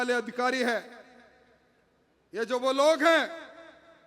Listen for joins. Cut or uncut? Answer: uncut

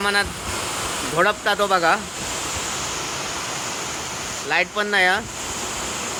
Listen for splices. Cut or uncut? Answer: uncut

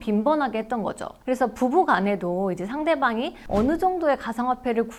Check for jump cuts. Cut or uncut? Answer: uncut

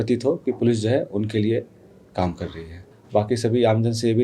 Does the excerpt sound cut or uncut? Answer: cut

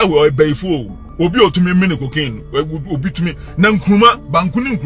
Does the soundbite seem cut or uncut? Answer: cut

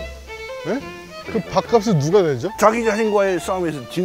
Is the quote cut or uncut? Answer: cut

